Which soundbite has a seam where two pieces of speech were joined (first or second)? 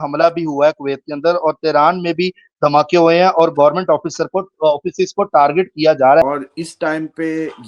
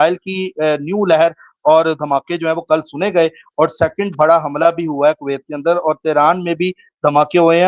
first